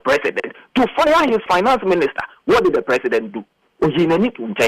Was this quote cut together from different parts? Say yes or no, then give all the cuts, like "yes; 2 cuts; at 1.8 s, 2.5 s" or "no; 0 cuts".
yes; 1 cut; at 1.5 s